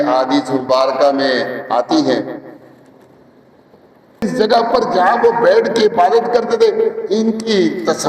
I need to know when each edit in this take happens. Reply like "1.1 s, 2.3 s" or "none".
4.3 s